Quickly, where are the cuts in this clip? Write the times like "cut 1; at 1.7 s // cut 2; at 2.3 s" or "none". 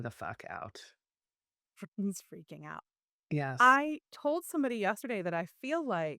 cut 1; at 5.0 s